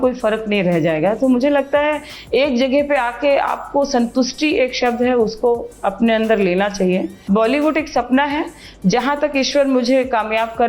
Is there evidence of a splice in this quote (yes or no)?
yes